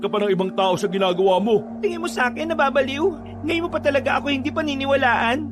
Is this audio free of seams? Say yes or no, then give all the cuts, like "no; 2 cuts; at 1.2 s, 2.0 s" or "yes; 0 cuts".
no; 2 cuts; at 1.7 s, 3.3 s